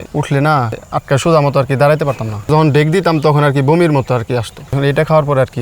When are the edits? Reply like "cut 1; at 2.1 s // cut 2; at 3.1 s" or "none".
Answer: none